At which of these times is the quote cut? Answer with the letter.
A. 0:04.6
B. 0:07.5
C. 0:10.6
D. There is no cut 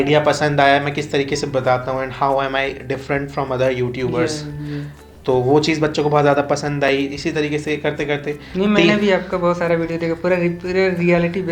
D